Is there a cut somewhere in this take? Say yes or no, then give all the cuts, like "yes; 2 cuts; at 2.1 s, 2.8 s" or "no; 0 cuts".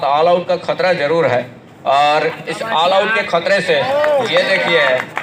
no; 0 cuts